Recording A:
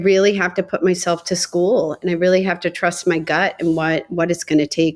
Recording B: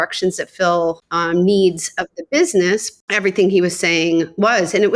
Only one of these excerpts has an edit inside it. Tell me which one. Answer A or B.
B